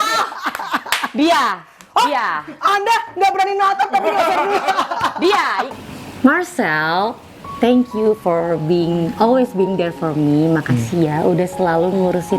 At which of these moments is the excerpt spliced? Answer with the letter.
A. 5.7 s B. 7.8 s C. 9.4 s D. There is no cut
A